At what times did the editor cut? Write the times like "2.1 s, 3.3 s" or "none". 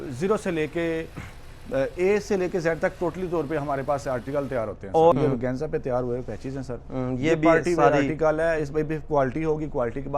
5.1 s